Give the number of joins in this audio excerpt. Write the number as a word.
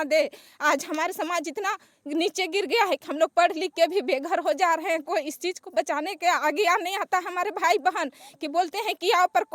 zero